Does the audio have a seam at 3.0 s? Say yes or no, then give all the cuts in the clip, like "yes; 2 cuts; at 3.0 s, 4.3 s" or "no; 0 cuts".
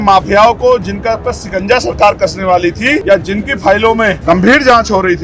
yes; 2 cuts; at 3.0 s, 4.2 s